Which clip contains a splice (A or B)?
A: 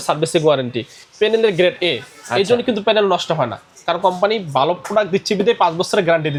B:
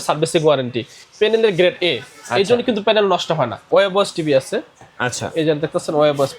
B